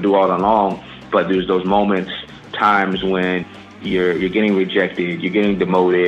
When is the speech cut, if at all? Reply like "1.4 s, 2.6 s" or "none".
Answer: 1.0 s, 2.5 s, 3.7 s